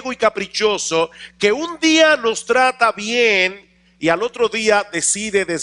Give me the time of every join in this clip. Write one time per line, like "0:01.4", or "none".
none